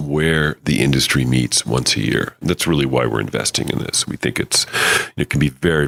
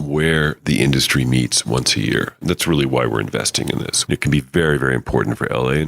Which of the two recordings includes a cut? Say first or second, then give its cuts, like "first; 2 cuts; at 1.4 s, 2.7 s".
second; 1 cut; at 4.0 s